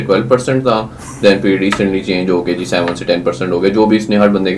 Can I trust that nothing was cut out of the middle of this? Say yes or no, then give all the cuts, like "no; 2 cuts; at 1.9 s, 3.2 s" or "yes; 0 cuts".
yes; 0 cuts